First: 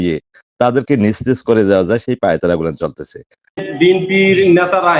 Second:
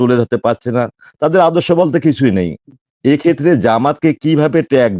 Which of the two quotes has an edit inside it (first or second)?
first